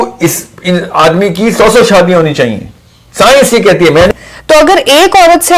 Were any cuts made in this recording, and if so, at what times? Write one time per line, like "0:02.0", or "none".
0:04.1